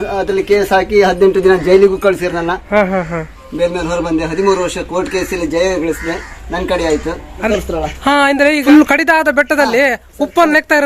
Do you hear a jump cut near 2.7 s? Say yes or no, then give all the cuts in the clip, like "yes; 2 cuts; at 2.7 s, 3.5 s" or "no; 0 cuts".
no; 2 cuts; at 7.5 s, 8.6 s